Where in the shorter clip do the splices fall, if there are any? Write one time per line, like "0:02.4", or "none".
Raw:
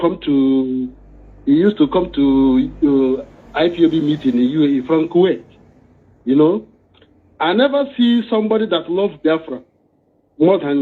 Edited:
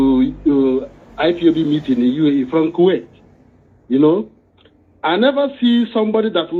none